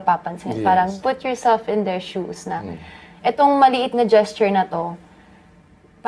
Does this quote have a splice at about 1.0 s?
yes; 1 cut; at 1.0 s

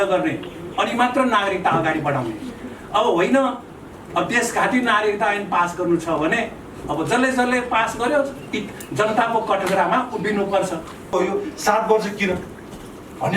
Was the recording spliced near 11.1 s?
yes; 1 cut; at 11.1 s

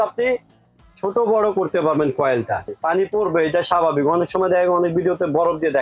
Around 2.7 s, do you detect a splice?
yes; 1 cut; at 2.7 s

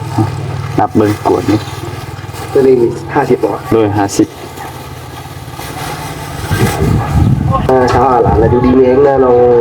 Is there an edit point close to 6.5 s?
yes; 1 cut; at 6.5 s

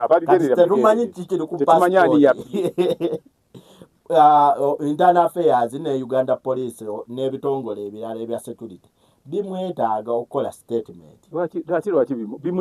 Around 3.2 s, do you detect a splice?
no; 1 cut; at 6.9 s

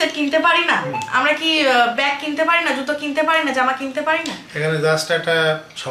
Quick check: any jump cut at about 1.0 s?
no; 0 cuts

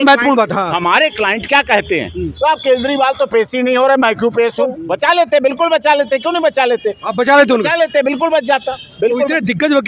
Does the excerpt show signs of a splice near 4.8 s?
yes; 1 cut; at 4.8 s

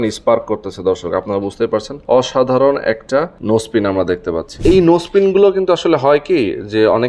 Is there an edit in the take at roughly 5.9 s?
no; 3 cuts; at 1.9 s, 3.3 s, 4.5 s

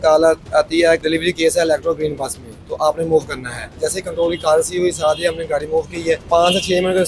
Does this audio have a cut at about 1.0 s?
yes; 3 cuts; at 1.0 s, 3.7 s, 6.3 s

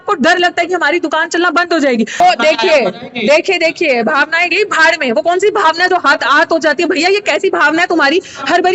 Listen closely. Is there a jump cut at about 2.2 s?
yes; 1 cut; at 2.2 s

